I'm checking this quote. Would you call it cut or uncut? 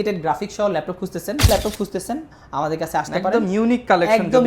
cut